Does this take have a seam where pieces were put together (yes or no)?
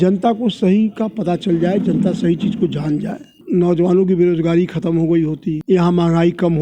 yes